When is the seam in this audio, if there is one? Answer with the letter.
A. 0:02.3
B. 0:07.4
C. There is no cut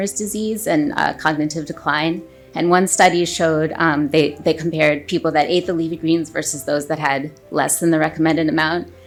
C